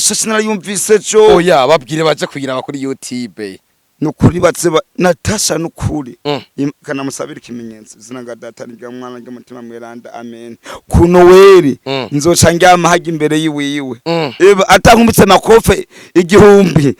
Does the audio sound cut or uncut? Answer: uncut